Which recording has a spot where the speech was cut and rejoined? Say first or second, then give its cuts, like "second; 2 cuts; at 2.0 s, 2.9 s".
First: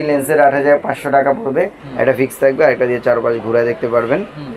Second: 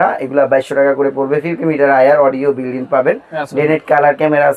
first; 1 cut; at 1.8 s